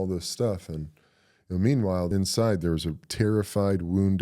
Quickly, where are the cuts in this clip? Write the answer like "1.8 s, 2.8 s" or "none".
2.1 s, 3.1 s